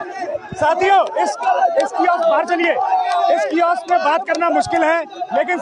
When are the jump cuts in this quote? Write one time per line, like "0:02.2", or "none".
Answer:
none

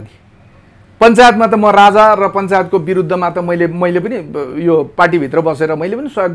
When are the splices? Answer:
none

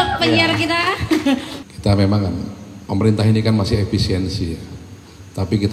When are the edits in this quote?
0:01.5

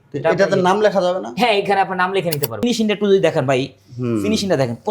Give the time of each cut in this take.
0:02.6

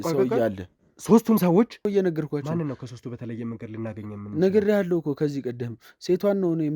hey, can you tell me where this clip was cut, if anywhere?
0:01.8

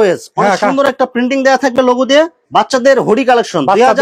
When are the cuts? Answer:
0:02.4

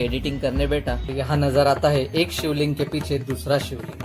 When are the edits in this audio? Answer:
0:01.1

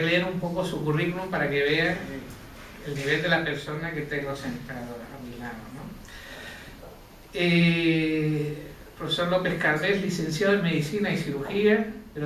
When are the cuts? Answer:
none

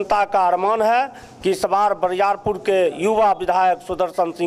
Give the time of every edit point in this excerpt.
none

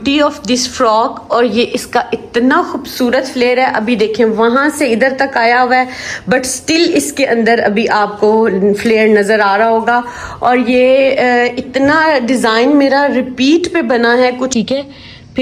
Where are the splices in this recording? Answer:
0:14.5

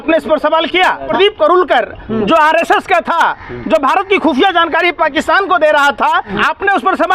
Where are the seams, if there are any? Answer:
0:01.1
0:06.4

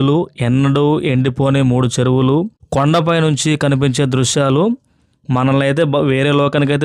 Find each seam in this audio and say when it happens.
0:02.6

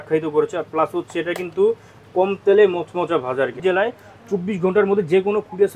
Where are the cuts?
0:03.5

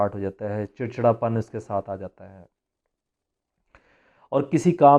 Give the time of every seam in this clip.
none

